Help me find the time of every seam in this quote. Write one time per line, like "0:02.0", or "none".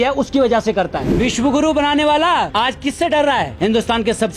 0:01.0
0:02.5
0:03.5